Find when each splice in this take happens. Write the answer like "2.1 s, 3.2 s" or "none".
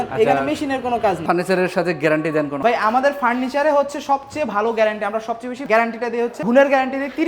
1.2 s, 2.6 s, 6.4 s

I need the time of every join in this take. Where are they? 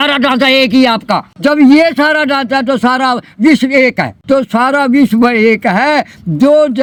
none

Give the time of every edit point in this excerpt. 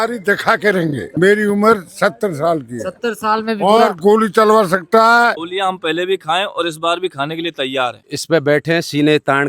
1.0 s, 5.3 s, 8.0 s

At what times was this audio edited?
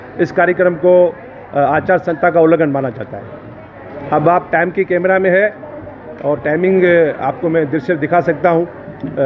none

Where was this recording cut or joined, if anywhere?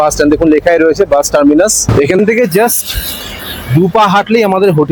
2.2 s

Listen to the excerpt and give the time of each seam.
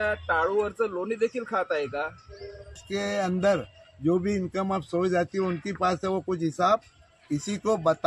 2.8 s

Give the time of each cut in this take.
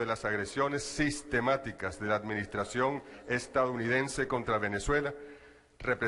4.8 s

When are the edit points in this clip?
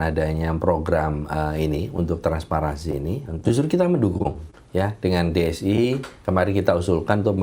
3.4 s

